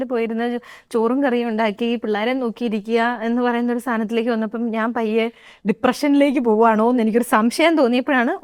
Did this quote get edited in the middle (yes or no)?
no